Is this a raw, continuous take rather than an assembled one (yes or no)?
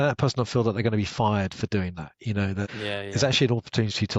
yes